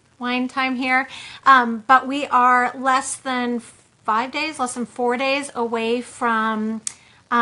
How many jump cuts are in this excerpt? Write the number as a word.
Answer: one